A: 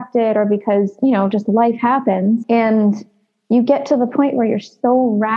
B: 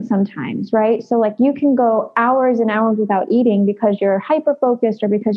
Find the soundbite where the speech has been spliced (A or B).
A